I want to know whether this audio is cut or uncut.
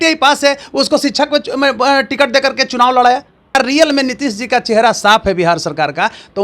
cut